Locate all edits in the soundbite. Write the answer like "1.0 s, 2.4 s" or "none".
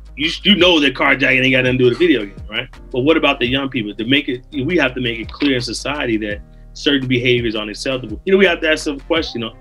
2.8 s, 8.1 s